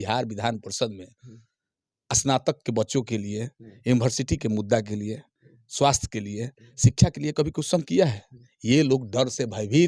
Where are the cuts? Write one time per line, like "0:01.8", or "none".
none